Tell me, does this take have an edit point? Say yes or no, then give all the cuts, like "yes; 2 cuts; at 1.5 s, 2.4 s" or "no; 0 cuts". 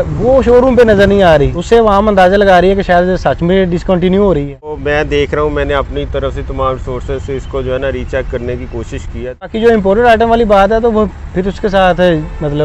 yes; 2 cuts; at 4.8 s, 9.5 s